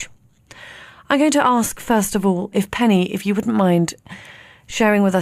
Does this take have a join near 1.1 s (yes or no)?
yes